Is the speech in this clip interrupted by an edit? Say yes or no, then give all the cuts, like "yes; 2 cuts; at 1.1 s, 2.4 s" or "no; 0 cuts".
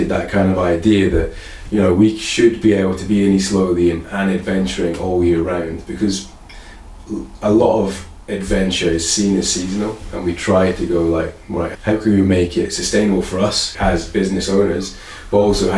no; 0 cuts